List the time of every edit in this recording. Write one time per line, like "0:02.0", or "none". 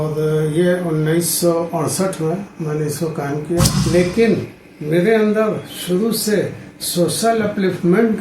0:03.8